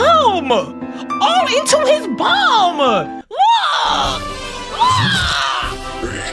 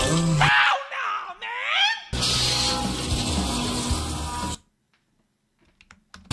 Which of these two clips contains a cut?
second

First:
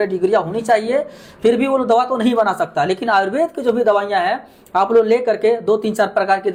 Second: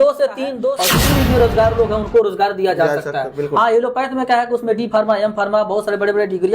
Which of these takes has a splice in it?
second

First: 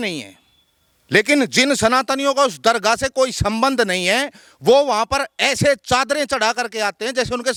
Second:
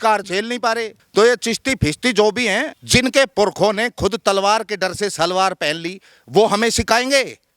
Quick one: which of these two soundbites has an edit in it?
second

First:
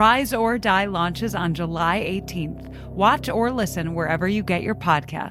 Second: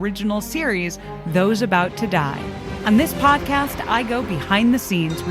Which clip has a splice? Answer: second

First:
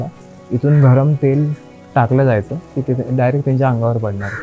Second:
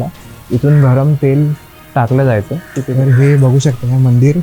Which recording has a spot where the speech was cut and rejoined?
second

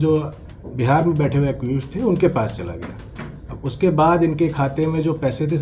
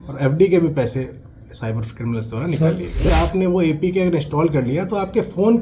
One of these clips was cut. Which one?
second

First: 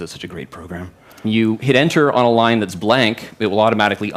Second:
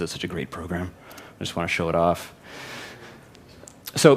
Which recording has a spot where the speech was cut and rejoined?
second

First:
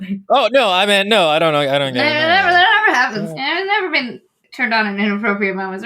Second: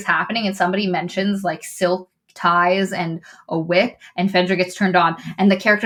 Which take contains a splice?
first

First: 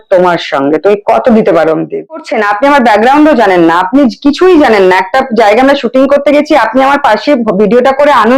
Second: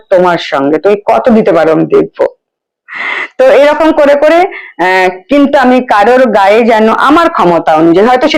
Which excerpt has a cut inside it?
first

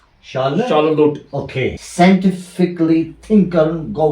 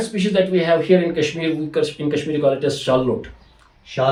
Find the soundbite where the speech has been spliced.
first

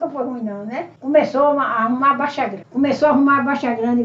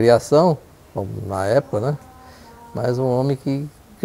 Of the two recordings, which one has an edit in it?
first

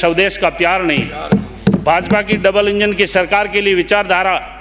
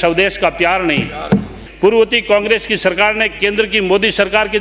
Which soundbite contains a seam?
second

